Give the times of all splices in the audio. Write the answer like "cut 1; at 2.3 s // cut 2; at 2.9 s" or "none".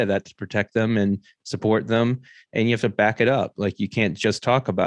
none